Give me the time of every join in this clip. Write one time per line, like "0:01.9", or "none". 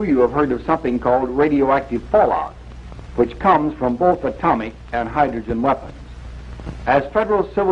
0:04.3